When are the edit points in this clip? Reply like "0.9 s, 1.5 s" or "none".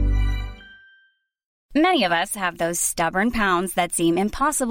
1.6 s